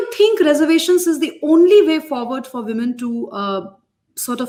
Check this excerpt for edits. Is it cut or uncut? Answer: uncut